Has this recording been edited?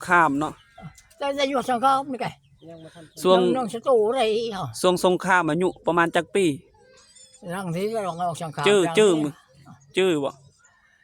no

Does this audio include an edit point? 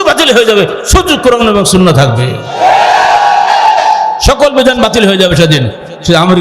no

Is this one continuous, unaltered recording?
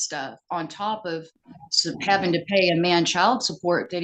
yes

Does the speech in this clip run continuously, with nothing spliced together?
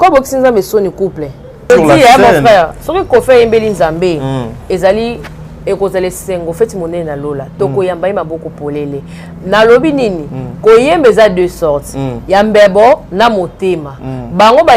no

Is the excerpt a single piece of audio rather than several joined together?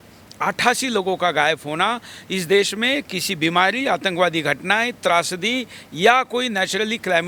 yes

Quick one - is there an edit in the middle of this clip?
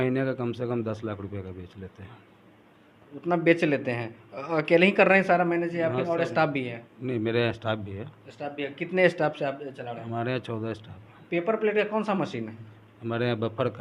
no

